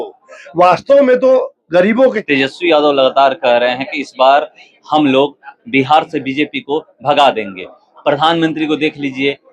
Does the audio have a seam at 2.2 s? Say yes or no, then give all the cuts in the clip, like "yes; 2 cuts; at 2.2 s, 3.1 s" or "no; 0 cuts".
yes; 1 cut; at 2.2 s